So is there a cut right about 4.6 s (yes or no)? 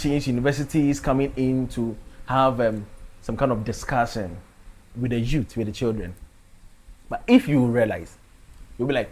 no